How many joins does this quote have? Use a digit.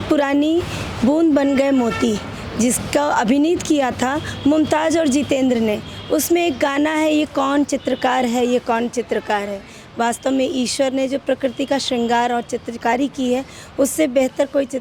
0